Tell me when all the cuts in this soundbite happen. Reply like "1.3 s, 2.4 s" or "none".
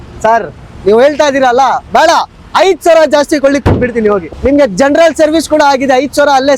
4.2 s